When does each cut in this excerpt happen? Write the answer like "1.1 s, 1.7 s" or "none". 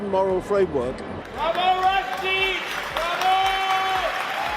1.2 s